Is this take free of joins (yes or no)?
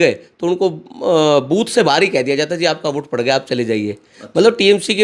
yes